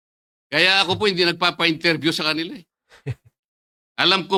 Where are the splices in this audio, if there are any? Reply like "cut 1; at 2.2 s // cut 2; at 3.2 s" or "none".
none